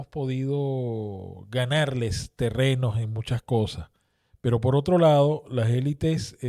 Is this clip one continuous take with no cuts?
yes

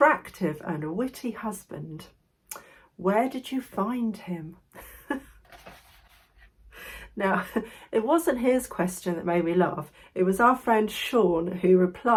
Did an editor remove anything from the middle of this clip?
no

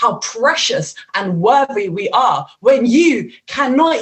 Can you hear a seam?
no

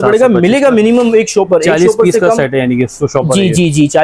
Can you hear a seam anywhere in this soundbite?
no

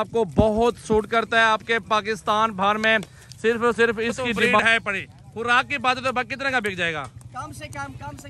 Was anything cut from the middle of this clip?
yes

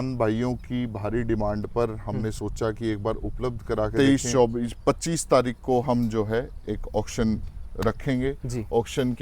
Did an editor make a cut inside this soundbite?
yes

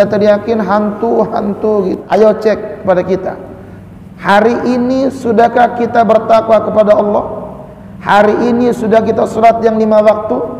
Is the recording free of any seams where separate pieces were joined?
no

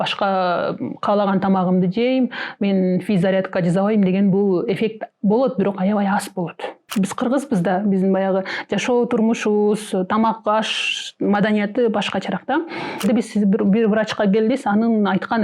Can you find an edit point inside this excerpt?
yes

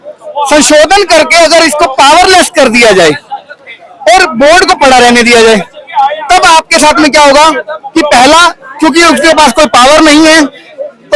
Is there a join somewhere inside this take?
no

